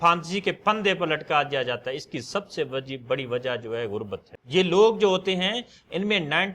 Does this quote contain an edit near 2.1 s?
no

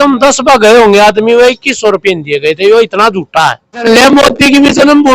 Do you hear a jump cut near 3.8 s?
yes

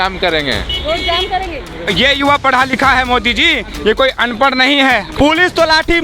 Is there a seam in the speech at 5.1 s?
yes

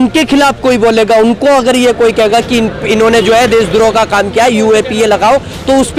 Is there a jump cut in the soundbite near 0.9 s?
no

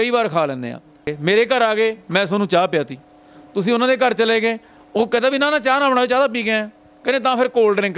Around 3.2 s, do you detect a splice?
no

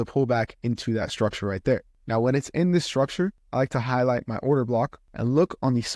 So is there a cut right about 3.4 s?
yes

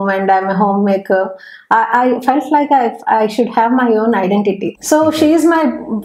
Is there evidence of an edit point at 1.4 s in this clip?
no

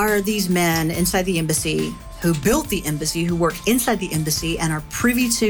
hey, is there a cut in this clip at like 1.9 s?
no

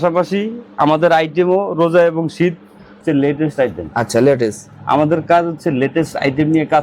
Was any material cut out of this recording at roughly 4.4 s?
no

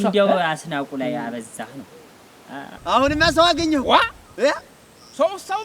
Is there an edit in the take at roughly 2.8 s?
yes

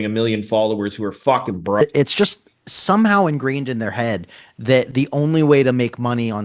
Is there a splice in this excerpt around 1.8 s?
yes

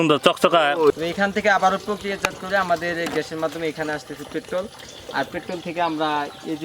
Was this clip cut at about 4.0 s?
no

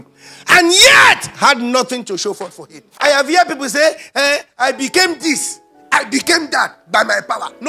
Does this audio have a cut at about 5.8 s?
no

